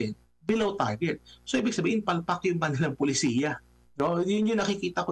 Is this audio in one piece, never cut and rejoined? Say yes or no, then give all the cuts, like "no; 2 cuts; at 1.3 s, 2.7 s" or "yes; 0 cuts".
yes; 0 cuts